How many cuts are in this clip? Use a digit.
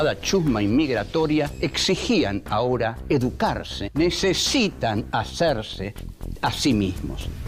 2